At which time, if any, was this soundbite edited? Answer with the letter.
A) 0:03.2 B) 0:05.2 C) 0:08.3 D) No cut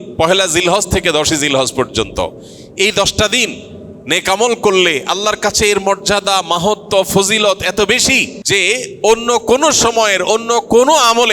C